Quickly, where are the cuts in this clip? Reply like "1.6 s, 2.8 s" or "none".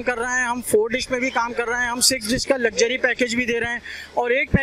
none